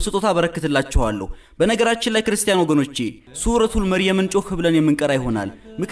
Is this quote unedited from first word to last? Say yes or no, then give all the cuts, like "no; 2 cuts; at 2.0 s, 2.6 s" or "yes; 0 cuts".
no; 1 cut; at 3.3 s